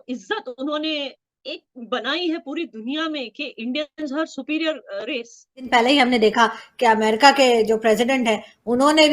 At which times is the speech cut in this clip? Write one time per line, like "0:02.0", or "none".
0:05.7

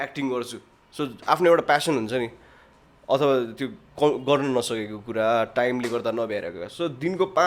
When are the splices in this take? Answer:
none

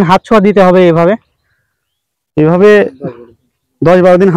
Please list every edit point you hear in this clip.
none

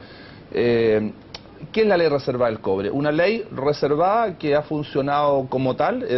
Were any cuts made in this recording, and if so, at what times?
0:01.4

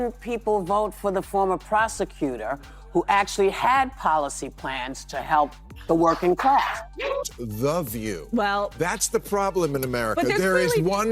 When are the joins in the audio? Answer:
0:07.2

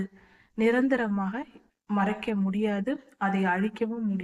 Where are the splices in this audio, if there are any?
none

